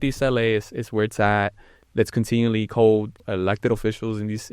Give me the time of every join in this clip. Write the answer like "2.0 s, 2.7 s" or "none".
3.2 s